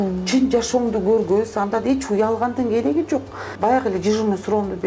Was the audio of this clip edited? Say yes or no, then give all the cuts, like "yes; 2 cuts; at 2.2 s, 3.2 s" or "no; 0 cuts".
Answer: yes; 1 cut; at 3.4 s